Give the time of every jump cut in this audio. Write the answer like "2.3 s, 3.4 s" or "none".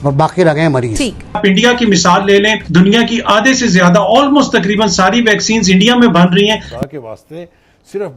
1.4 s, 2.6 s, 6.6 s